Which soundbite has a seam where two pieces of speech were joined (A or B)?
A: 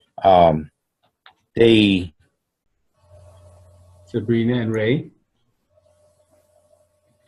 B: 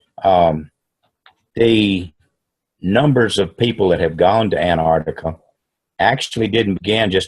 B